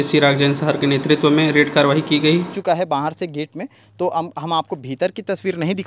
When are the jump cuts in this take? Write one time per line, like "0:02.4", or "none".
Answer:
0:02.5